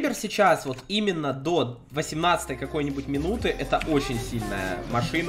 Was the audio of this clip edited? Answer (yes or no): no